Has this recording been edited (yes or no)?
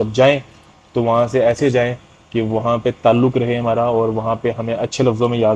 no